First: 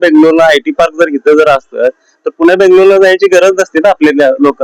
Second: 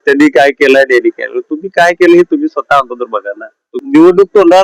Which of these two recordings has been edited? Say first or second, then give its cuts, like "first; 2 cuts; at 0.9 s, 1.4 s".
second; 1 cut; at 3.7 s